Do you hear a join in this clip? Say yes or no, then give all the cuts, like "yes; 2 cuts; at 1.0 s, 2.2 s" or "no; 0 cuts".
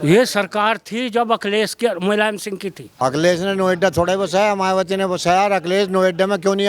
yes; 1 cut; at 2.8 s